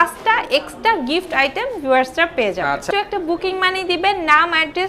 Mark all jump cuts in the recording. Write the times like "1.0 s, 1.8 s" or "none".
2.9 s